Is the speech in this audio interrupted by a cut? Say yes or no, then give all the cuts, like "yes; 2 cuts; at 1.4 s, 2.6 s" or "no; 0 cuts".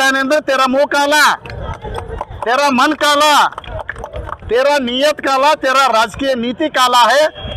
no; 0 cuts